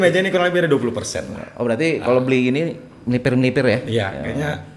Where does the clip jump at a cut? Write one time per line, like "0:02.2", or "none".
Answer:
none